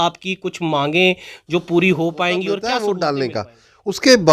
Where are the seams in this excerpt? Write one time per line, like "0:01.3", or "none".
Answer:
0:02.6